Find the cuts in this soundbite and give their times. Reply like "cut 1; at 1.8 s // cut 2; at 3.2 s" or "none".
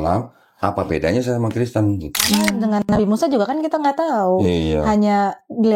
cut 1; at 2.5 s